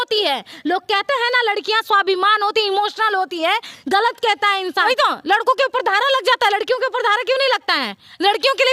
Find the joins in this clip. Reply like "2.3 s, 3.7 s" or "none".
4.9 s